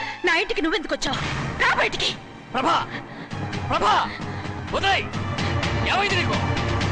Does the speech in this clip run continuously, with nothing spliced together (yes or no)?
yes